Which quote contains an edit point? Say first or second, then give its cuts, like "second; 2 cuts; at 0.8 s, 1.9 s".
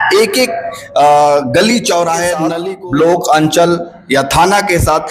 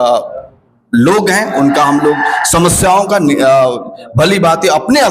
first; 1 cut; at 2.6 s